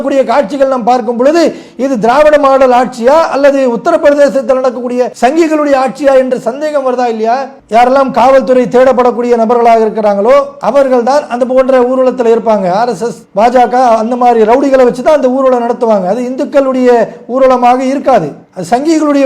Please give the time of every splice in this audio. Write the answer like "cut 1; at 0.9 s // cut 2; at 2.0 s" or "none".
cut 1; at 5.1 s // cut 2; at 7.6 s